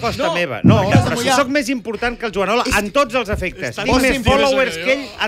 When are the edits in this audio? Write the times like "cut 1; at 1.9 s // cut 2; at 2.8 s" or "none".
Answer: cut 1; at 0.9 s